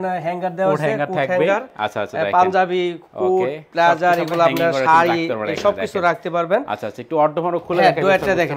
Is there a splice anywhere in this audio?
no; 0 cuts

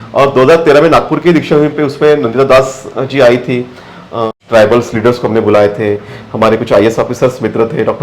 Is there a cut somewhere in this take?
yes; 1 cut; at 4.3 s

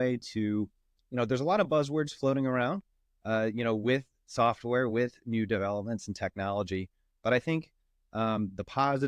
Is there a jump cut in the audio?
no; 0 cuts

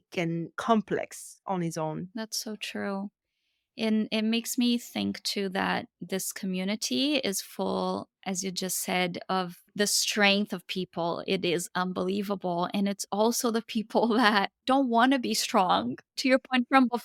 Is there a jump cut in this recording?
no; 0 cuts

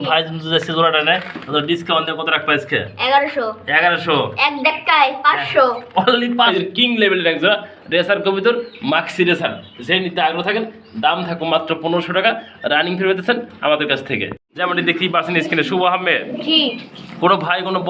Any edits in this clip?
yes; 2 cuts; at 6.5 s, 14.5 s

